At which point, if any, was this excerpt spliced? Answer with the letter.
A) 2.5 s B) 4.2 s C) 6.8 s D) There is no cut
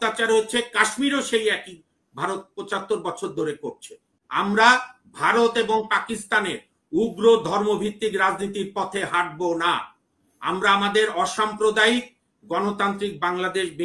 B